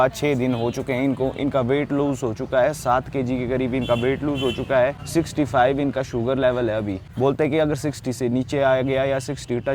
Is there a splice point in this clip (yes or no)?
no